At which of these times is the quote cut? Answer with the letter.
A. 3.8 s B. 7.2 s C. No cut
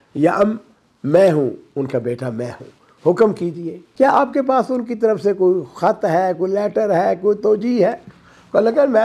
A